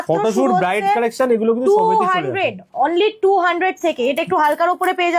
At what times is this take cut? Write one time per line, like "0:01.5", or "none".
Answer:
none